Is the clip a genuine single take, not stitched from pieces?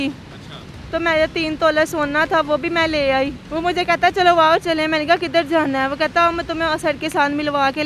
no; 1 cut; at 3.4 s

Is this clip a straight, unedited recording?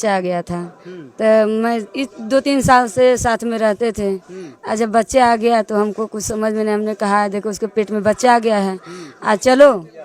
yes; 0 cuts

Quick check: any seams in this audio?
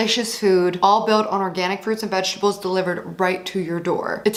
no; 0 cuts

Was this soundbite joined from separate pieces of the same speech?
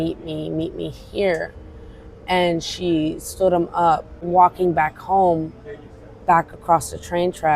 yes; 1 cut; at 4.1 s

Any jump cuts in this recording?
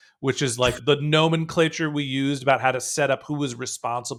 no; 0 cuts

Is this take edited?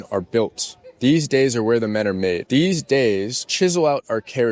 yes; 2 cuts; at 2.4 s, 3.4 s

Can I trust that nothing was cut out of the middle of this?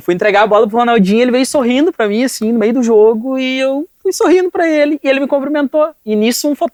yes; 0 cuts

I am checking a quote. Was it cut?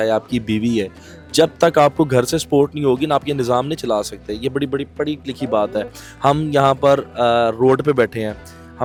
no; 0 cuts

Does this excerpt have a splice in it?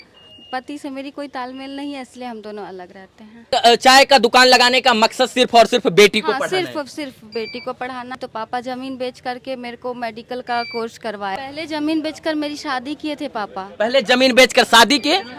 yes; 3 cuts; at 3.5 s, 8.2 s, 11.4 s

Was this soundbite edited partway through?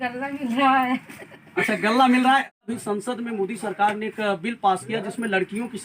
yes; 1 cut; at 2.6 s

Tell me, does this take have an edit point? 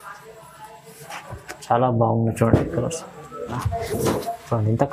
yes; 1 cut; at 3.6 s

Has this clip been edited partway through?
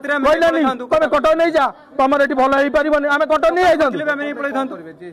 no; 0 cuts

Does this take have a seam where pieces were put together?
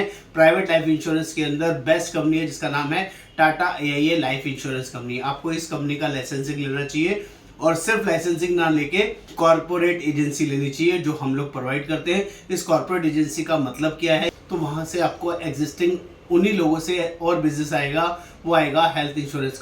yes; 1 cut; at 14.3 s

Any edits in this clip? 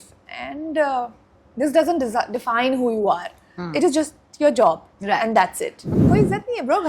yes; 1 cut; at 5.9 s

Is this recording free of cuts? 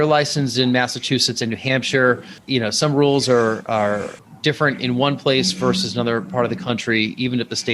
yes; 0 cuts

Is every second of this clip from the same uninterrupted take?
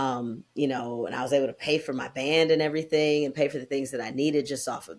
yes; 0 cuts

